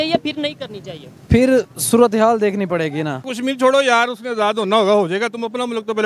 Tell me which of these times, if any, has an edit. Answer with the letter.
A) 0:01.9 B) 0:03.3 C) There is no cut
B